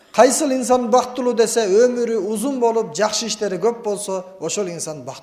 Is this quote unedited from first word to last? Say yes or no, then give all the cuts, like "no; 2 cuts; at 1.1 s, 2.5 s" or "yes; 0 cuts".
yes; 0 cuts